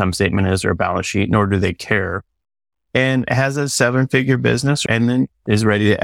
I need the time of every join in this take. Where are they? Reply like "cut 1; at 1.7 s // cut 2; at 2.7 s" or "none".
cut 1; at 4.9 s